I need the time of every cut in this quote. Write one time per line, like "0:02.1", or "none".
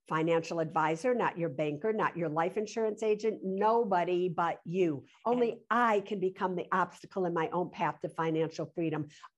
0:05.1